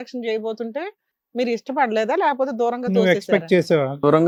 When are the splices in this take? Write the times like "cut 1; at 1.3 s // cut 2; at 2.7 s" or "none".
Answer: none